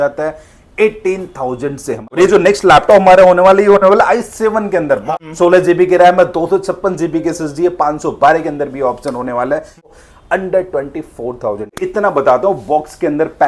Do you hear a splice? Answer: yes; 4 cuts; at 2.1 s, 5.0 s, 9.9 s, 11.7 s

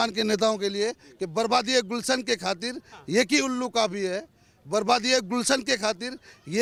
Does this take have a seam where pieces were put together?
no; 0 cuts

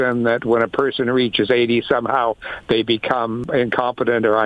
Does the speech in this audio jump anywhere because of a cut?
yes; 1 cut; at 3.4 s

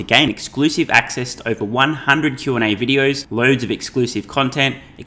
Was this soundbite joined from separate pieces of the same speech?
no; 0 cuts

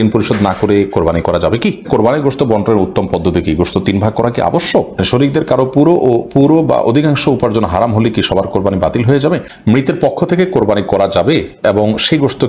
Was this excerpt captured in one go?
no; 3 cuts; at 1.9 s, 5.0 s, 9.5 s

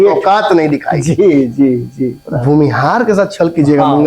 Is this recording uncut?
no; 1 cut; at 2.3 s

